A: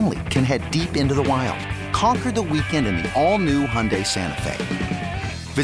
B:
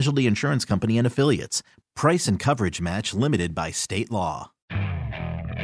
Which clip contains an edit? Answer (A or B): B